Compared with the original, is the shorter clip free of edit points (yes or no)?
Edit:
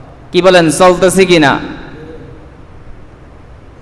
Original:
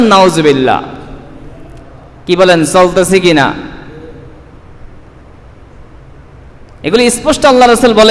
yes